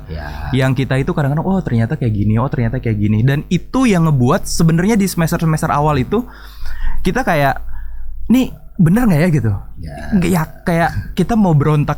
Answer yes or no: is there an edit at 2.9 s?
no